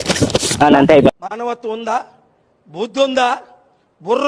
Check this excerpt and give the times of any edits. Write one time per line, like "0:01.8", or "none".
0:01.1